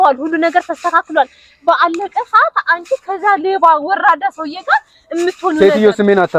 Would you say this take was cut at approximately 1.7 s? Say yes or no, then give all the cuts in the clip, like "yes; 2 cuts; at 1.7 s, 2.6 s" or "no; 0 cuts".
no; 0 cuts